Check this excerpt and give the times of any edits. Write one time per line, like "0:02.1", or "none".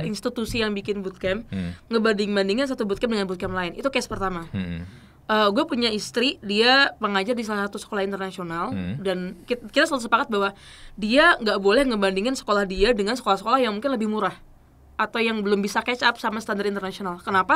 none

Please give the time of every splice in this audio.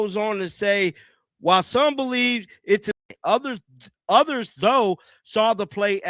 0:03.0

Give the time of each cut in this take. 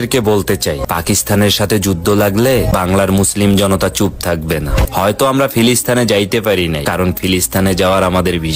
none

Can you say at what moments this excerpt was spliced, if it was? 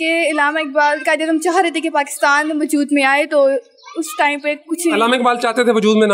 none

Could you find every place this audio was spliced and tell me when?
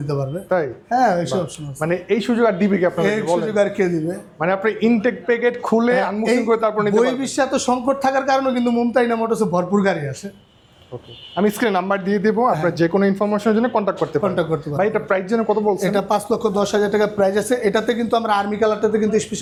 none

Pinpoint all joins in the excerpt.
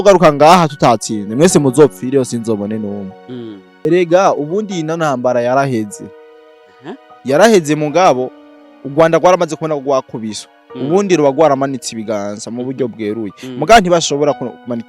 0:03.8

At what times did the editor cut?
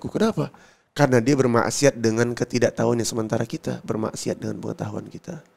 none

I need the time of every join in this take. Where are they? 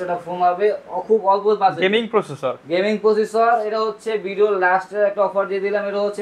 none

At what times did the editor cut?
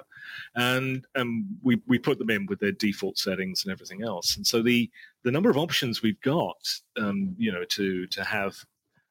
none

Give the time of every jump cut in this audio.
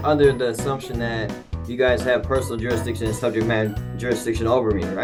none

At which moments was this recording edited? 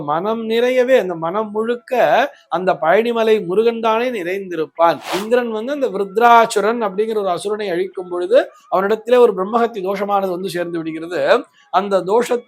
0:05.1

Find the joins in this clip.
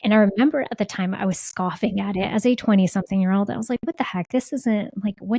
none

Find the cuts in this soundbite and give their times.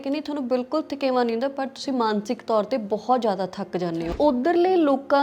0:04.1

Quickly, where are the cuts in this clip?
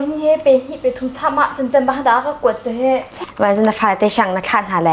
0:03.2

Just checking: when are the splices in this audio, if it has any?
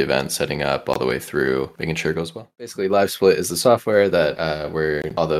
0:02.6

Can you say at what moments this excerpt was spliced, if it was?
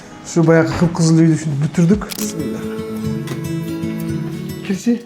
0:02.1

